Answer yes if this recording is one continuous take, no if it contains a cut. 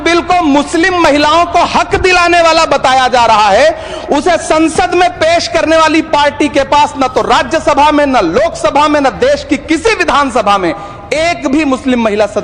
yes